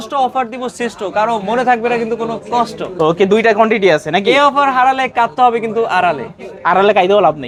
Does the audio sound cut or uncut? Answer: uncut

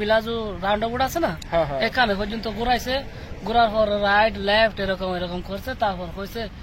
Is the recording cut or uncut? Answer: uncut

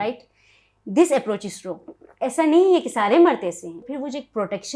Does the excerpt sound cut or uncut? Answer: cut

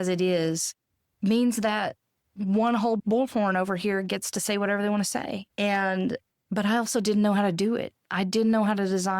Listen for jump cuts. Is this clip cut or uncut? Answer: cut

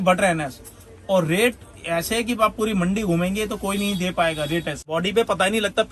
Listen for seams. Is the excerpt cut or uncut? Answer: cut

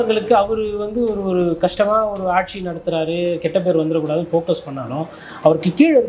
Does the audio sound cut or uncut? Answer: uncut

